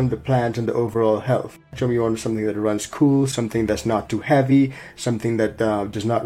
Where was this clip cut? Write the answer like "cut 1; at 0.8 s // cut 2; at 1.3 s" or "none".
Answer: cut 1; at 1.7 s